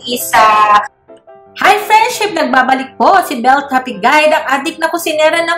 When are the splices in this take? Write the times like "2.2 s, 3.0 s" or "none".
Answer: 1.0 s